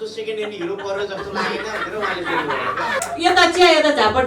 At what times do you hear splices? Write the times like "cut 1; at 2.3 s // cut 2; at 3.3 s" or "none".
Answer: cut 1; at 3.0 s

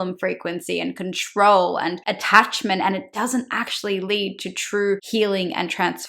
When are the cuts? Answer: cut 1; at 2.1 s // cut 2; at 5.0 s

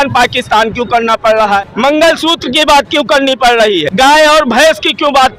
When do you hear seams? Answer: cut 1; at 1.6 s // cut 2; at 3.9 s

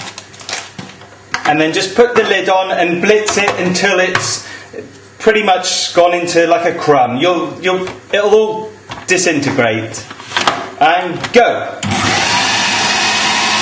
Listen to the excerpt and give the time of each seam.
cut 1; at 4.0 s

